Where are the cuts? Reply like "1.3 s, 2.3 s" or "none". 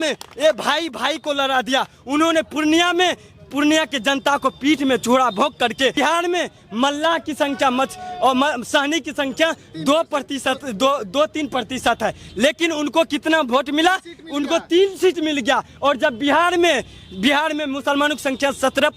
5.9 s